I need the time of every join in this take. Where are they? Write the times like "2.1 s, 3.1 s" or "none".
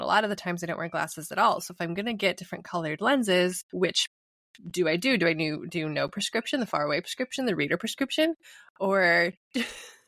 3.6 s